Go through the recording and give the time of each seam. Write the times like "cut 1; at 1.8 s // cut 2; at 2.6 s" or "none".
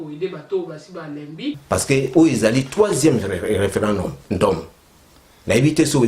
cut 1; at 1.6 s

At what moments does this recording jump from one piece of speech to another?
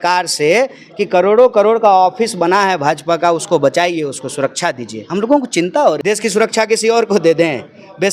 cut 1; at 6.0 s

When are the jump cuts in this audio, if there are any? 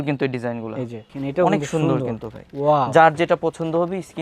cut 1; at 1.1 s

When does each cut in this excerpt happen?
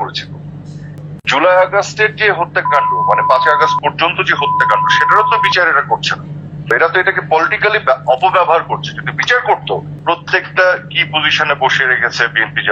cut 1; at 1.1 s // cut 2; at 9.9 s

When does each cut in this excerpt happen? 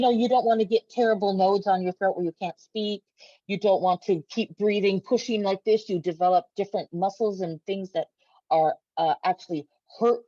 none

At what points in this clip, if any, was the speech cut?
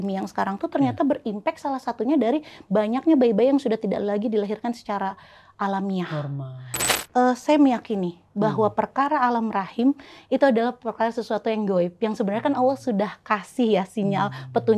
cut 1; at 6.8 s

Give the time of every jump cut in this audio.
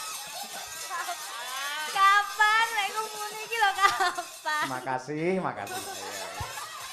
none

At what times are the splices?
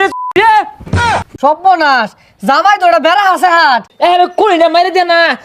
cut 1; at 1.0 s // cut 2; at 3.9 s

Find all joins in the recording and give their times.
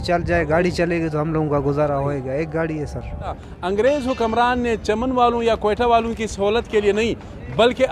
cut 1; at 3.5 s

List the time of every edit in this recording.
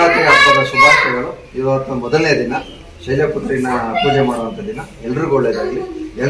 none

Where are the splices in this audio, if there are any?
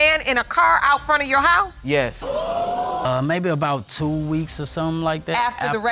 cut 1; at 3.0 s

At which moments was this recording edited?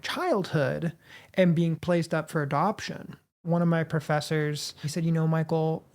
cut 1; at 3.4 s // cut 2; at 4.9 s

